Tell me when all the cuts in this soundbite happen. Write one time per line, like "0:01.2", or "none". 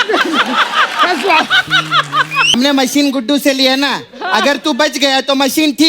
0:02.5